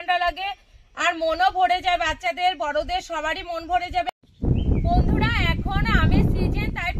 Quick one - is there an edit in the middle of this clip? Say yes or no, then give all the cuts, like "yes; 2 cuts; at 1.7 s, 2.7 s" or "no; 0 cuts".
no; 0 cuts